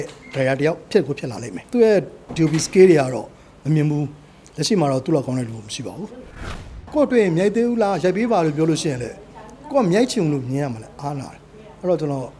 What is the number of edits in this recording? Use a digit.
2